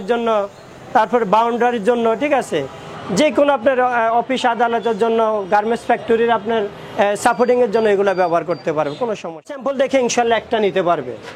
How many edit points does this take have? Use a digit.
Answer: 1